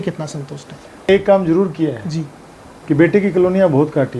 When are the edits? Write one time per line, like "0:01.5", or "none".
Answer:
0:01.1